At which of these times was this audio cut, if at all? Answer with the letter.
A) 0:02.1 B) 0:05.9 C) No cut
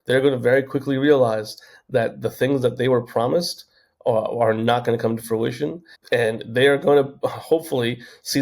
B